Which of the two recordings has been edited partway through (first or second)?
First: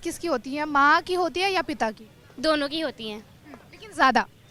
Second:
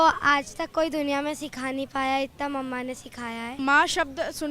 second